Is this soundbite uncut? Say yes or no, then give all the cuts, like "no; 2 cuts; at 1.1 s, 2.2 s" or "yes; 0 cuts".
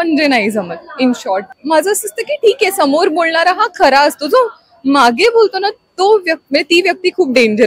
no; 1 cut; at 1.5 s